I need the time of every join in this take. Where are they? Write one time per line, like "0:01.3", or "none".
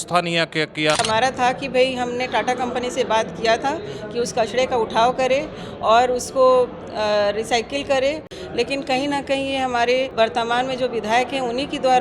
0:01.0
0:08.3
0:10.1